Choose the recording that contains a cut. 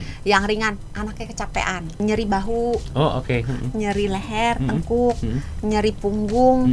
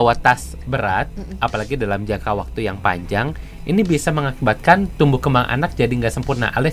first; 1 cut; at 2.0 s

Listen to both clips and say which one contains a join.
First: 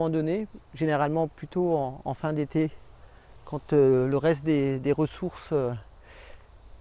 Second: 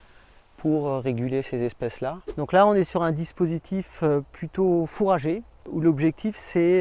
second; 2 cuts; at 2.2 s, 5.6 s

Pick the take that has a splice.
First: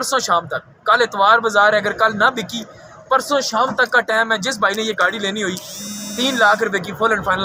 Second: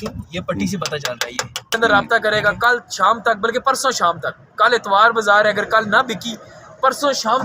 second; 1 cut; at 1.8 s

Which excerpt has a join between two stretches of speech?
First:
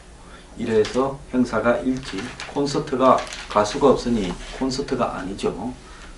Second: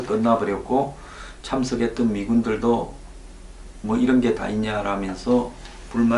first; 1 cut; at 2.0 s

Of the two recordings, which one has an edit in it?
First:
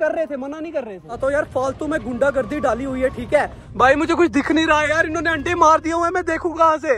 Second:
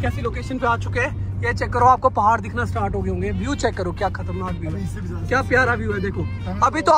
first; 2 cuts; at 1.1 s, 3.6 s

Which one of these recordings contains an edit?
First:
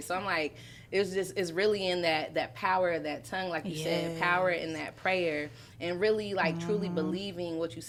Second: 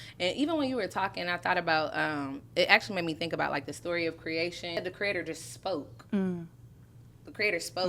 second; 1 cut; at 4.8 s

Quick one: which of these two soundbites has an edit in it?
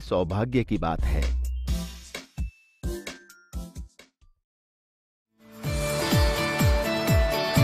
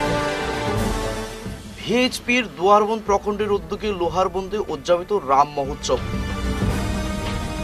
second; 1 cut; at 0.9 s

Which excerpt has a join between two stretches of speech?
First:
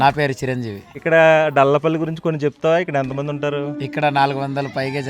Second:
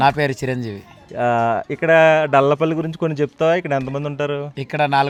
first; 1 cut; at 0.9 s

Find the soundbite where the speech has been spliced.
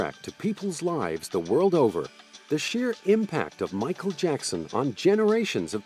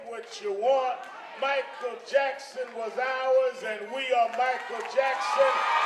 second; 1 cut; at 2.4 s

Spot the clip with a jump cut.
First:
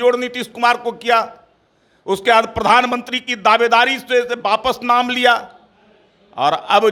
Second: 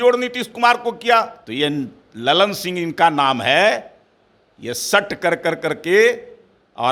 second; 1 cut; at 1.4 s

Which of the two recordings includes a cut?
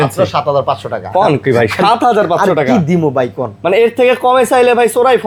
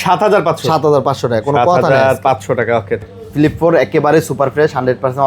second; 1 cut; at 3.0 s

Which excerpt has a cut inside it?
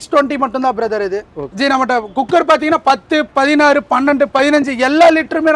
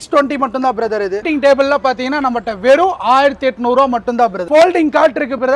second; 2 cuts; at 1.2 s, 4.5 s

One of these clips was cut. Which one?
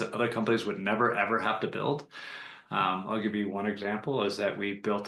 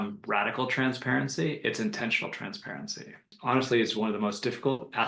second; 1 cut; at 3.4 s

